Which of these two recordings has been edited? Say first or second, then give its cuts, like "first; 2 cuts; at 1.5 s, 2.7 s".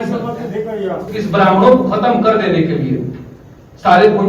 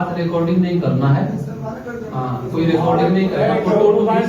first; 1 cut; at 1.1 s